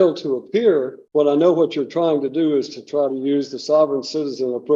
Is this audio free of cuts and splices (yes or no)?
no